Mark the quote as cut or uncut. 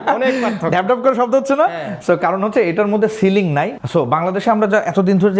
uncut